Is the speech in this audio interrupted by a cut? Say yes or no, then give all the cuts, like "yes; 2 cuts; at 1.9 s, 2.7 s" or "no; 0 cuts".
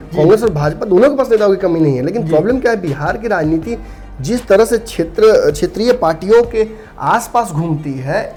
no; 0 cuts